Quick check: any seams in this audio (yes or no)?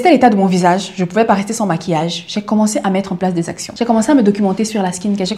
yes